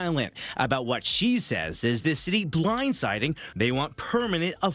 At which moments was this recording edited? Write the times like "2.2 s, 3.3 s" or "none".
3.5 s